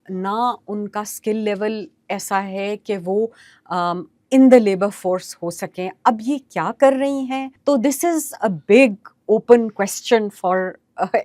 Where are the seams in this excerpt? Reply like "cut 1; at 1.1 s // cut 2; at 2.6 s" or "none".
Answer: cut 1; at 7.5 s